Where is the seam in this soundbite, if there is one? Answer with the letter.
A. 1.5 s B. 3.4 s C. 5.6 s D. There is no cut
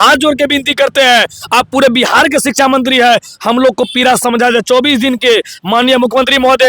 D